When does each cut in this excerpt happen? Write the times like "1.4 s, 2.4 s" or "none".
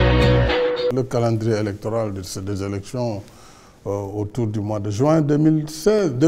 0.9 s, 2.1 s

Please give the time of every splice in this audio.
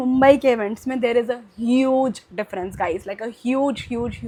none

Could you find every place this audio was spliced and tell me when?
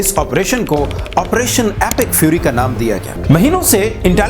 3.1 s

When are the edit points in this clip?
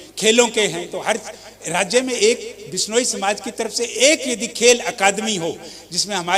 none

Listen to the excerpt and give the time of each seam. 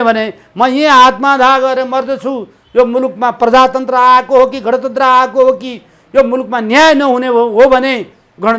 none

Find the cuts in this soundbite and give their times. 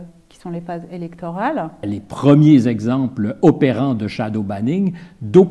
1.8 s

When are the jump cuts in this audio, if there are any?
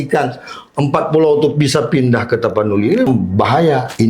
3.1 s

